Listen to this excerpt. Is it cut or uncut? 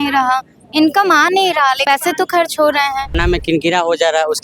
cut